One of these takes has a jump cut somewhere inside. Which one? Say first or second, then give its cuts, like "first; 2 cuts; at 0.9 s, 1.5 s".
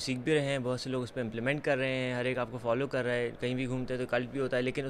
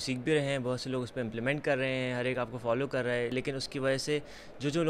second; 1 cut; at 3.3 s